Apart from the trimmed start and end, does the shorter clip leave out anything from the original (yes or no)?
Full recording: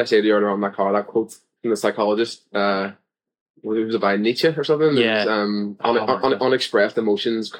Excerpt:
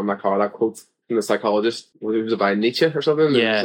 yes